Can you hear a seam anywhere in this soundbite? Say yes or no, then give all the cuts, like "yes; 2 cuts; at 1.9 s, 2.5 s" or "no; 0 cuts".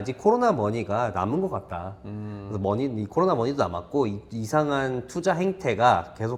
no; 0 cuts